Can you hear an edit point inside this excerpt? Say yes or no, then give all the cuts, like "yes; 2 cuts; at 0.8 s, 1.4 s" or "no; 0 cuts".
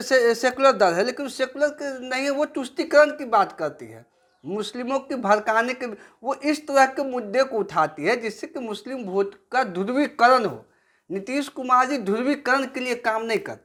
no; 0 cuts